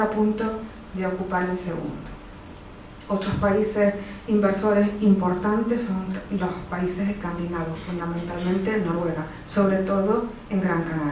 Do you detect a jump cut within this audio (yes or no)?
no